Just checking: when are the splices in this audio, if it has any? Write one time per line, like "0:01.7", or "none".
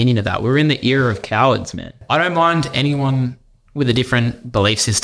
0:02.0